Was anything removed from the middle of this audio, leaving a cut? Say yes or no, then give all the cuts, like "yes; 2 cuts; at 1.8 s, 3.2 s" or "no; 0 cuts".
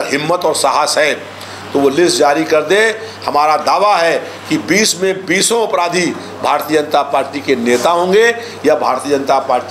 no; 0 cuts